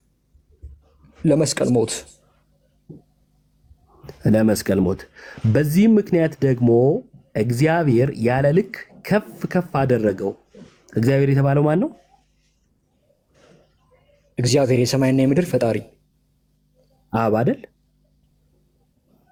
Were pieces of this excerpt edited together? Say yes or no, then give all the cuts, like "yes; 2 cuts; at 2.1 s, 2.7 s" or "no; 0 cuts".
no; 0 cuts